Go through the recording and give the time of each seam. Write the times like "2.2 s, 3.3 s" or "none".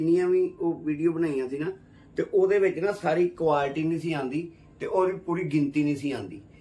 none